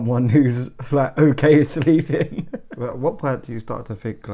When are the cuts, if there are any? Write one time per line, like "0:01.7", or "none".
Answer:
0:02.6